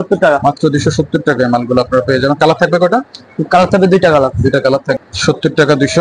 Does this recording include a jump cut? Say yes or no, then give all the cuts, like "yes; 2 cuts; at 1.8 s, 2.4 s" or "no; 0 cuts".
yes; 1 cut; at 5.0 s